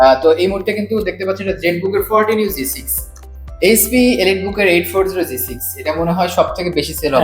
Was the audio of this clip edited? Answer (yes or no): yes